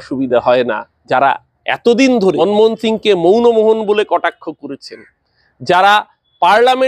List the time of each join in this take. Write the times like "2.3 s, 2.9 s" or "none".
1.2 s, 2.4 s